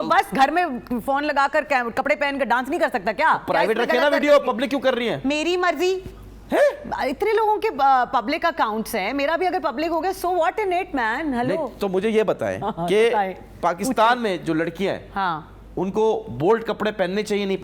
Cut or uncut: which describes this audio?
uncut